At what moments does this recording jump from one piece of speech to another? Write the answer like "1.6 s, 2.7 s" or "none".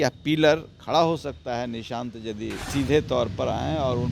2.6 s